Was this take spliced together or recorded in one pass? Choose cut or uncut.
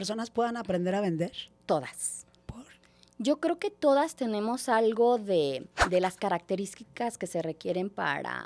cut